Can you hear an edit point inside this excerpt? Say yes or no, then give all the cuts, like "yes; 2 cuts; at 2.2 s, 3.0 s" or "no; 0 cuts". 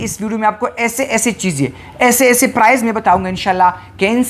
no; 0 cuts